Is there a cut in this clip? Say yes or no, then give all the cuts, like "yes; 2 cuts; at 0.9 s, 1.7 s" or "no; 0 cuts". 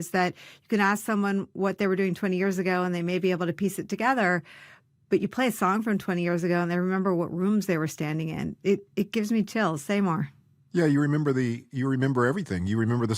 no; 0 cuts